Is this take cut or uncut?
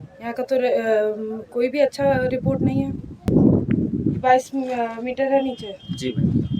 cut